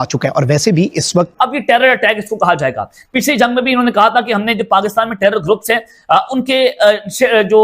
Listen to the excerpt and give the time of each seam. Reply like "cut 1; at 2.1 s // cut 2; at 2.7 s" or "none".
cut 1; at 1.3 s